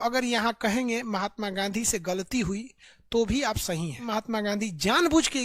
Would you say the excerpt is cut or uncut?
cut